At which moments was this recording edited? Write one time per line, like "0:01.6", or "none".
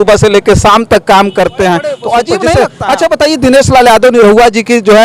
0:02.5